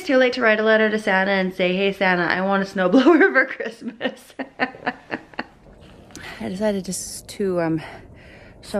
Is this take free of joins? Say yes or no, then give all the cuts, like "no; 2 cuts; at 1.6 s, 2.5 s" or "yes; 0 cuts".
yes; 0 cuts